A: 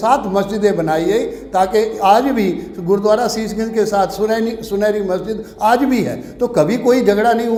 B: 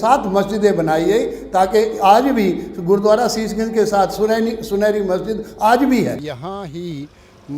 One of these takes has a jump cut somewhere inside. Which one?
B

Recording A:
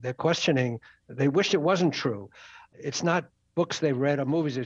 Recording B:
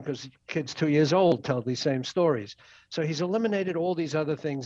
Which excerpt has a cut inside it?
A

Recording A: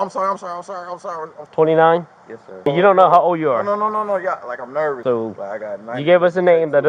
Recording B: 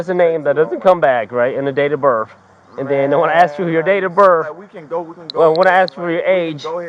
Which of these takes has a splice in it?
A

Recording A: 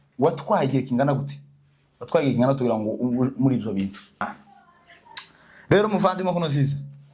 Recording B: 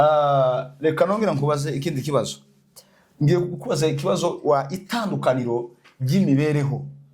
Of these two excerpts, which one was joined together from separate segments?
A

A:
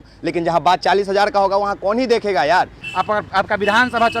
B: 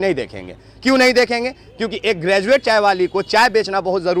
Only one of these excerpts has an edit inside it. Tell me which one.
A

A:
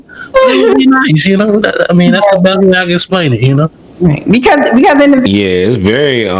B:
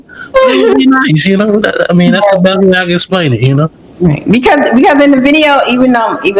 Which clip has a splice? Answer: A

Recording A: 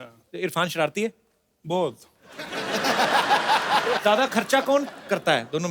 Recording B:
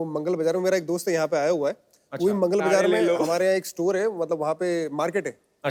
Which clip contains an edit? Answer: A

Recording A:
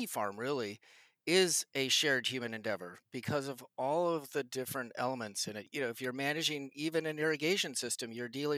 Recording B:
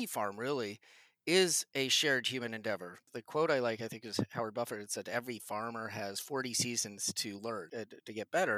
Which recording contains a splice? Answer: B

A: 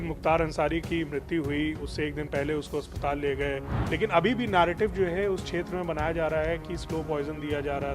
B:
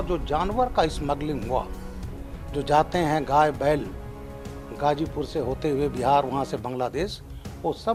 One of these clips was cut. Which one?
A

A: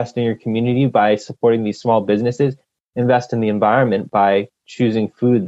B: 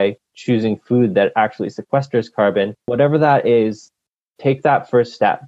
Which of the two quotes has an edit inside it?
B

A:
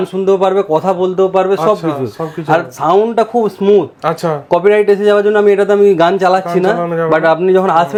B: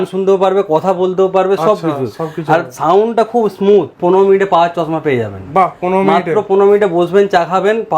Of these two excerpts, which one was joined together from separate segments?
B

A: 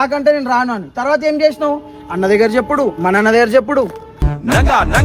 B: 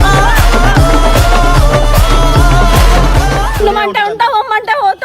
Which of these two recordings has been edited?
B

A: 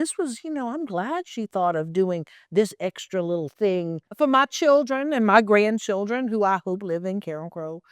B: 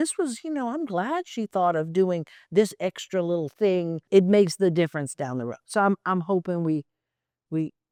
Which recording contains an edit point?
A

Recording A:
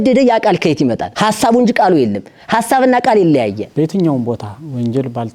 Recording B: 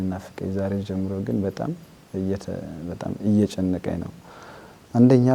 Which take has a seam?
A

